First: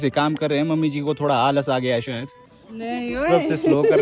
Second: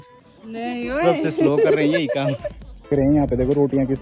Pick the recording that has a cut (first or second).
second